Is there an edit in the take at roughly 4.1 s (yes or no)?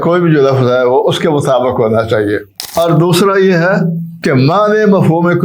yes